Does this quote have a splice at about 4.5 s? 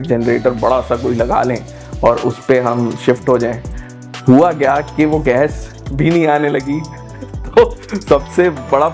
no; 0 cuts

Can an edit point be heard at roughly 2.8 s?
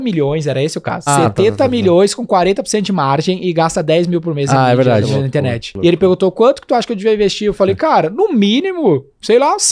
no; 2 cuts; at 1.1 s, 5.6 s

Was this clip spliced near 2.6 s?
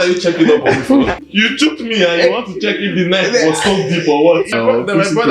no; 2 cuts; at 1.1 s, 4.5 s

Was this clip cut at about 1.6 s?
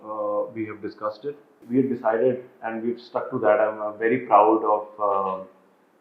yes; 1 cut; at 1.6 s

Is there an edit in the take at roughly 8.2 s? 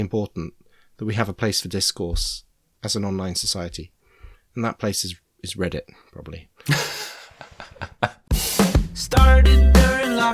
yes; 1 cut; at 8.2 s

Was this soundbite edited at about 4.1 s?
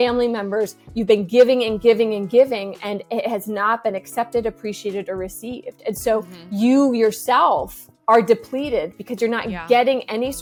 no; 0 cuts

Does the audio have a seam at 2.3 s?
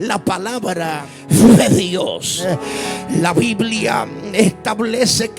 yes; 2 cuts; at 1.1 s, 2.3 s

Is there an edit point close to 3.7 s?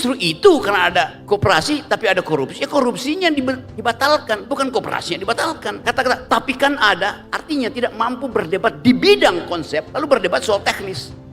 yes; 4 cuts; at 1.2 s, 3.7 s, 5.8 s, 9.9 s

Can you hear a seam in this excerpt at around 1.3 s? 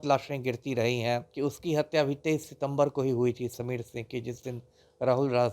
yes; 1 cut; at 1.3 s

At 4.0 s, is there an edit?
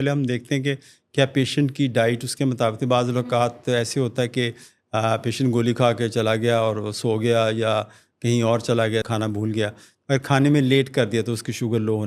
no; 1 cut; at 9.1 s

